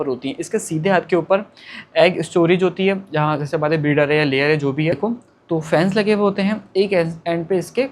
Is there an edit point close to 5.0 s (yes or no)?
yes